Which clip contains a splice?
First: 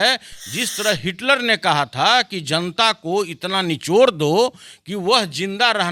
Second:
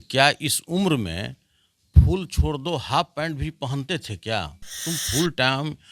second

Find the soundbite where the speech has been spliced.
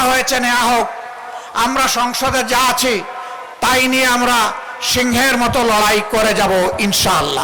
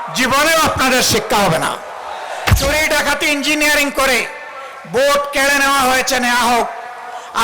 second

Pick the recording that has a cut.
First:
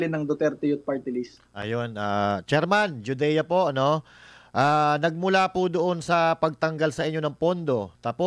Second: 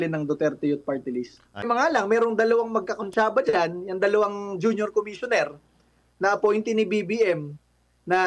second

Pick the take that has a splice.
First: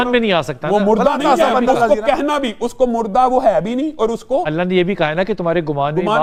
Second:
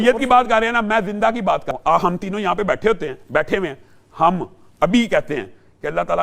second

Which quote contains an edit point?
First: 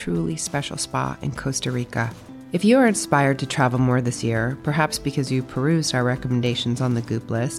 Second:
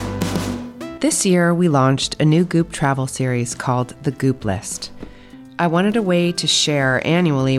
second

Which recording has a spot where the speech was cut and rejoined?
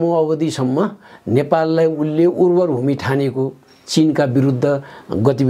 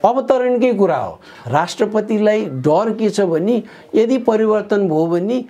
second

